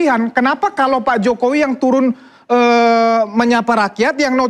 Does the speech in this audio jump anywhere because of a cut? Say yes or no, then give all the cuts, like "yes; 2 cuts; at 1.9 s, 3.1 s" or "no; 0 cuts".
no; 0 cuts